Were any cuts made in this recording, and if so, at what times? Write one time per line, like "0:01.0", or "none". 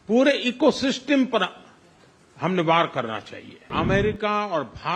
0:03.7